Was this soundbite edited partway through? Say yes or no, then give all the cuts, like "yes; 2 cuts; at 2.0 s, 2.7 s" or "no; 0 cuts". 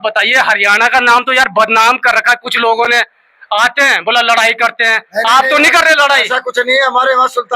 no; 0 cuts